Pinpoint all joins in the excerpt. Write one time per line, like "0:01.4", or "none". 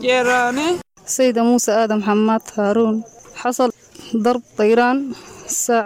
0:01.0
0:03.6